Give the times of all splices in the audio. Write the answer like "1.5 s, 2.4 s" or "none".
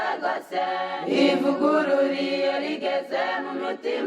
0.9 s